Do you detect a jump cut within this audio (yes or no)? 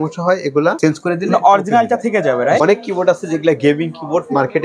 yes